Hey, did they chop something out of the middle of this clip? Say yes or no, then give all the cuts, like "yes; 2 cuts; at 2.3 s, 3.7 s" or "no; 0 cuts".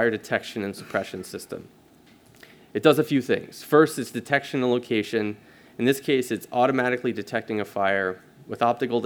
no; 0 cuts